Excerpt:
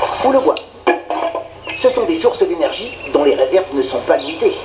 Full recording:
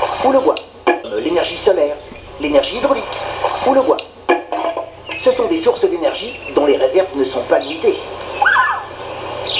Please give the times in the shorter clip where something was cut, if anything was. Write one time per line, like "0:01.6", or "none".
0:01.0